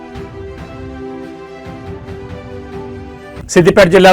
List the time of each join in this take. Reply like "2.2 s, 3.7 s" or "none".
2.9 s